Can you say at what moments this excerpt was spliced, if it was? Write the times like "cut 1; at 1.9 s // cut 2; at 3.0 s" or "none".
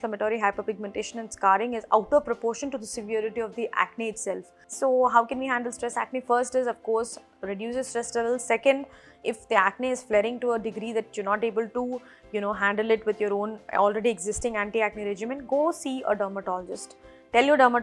cut 1; at 4.6 s